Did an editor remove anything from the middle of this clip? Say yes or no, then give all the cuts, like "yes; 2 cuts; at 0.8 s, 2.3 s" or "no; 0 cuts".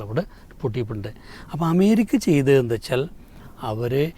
no; 0 cuts